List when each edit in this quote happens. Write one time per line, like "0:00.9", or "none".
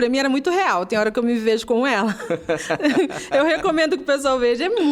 none